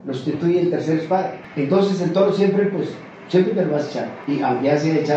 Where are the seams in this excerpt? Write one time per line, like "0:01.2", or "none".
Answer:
0:01.4
0:04.1